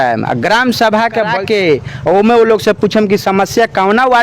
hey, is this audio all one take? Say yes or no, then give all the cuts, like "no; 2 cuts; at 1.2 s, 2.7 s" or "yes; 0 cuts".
no; 1 cut; at 1.3 s